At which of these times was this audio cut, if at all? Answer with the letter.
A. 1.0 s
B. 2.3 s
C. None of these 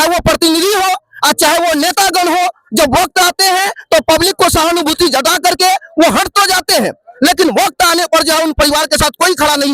C